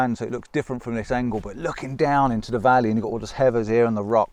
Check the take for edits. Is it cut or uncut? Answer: uncut